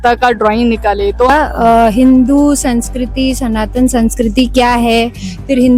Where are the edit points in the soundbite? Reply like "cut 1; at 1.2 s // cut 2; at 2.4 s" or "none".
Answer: cut 1; at 1.3 s